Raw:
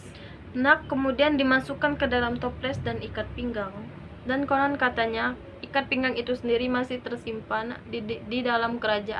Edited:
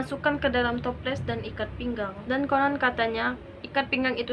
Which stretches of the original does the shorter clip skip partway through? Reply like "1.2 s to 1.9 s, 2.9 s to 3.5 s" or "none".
3.7 s to 4.2 s